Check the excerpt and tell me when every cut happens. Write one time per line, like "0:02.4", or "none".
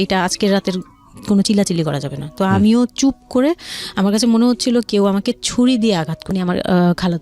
0:06.2